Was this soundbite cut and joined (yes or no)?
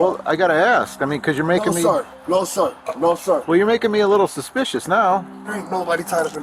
yes